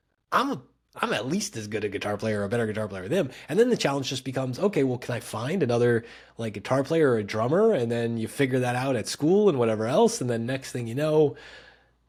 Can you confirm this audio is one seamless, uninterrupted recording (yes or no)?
yes